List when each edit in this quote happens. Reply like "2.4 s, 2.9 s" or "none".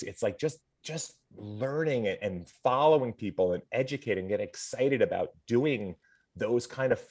none